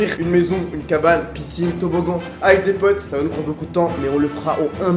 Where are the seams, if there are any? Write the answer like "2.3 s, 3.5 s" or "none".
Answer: 3.1 s